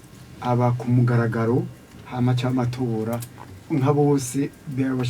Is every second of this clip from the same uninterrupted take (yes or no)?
yes